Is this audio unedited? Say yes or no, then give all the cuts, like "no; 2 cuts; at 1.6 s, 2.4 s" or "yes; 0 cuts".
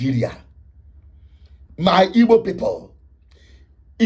yes; 0 cuts